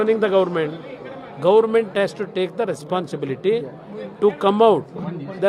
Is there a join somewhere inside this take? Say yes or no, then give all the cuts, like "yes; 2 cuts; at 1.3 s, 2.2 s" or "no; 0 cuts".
no; 0 cuts